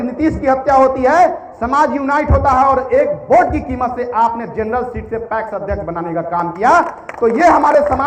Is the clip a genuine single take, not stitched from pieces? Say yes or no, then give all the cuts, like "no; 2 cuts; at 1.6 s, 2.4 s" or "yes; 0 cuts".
yes; 0 cuts